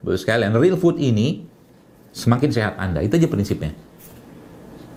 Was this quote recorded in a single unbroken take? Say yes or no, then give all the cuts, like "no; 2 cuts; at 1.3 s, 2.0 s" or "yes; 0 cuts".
yes; 0 cuts